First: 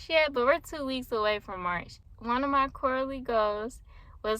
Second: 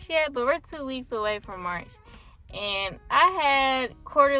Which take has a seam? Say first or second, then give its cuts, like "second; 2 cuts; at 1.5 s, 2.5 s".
first; 1 cut; at 2.1 s